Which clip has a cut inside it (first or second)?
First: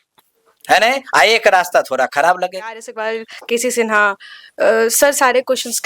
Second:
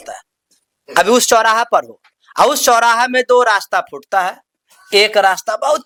first